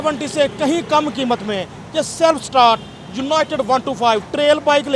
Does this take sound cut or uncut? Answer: uncut